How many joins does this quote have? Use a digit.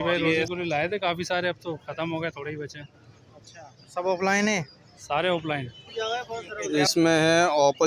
1